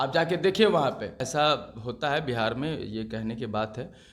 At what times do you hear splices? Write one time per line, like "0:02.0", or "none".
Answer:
0:01.3